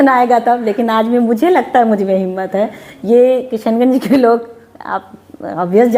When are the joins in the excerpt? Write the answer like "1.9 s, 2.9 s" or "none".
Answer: none